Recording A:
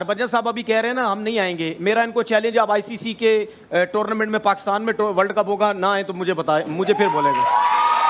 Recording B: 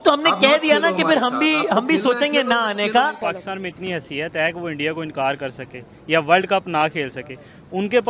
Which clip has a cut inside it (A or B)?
B